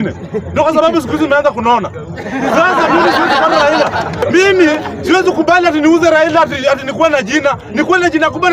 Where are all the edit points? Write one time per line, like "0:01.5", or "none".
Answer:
0:04.1